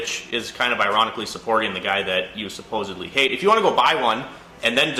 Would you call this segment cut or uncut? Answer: uncut